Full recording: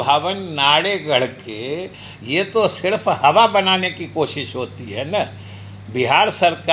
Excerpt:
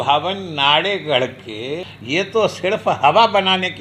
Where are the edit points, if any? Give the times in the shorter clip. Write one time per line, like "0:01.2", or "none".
0:01.9